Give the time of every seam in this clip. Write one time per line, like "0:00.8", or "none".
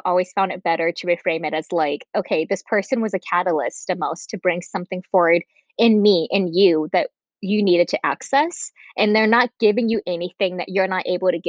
none